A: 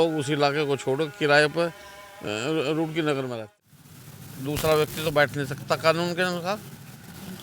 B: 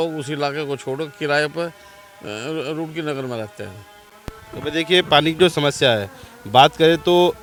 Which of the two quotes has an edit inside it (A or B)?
A